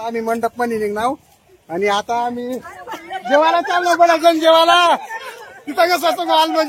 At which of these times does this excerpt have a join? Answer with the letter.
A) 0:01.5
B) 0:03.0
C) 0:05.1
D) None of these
C